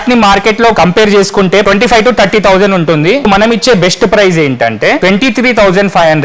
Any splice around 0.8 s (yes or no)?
yes